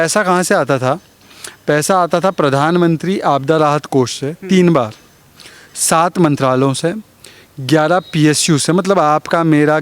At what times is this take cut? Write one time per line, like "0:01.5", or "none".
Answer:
none